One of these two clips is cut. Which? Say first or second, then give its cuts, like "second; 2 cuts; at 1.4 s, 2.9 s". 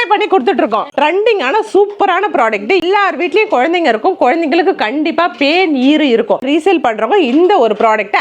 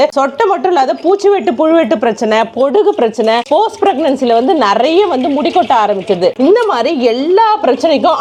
first; 3 cuts; at 0.9 s, 2.8 s, 6.4 s